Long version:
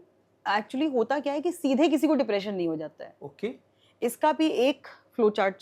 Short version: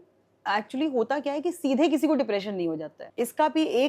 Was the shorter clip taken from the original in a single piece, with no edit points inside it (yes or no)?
no